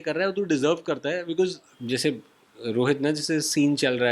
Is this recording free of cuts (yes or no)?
no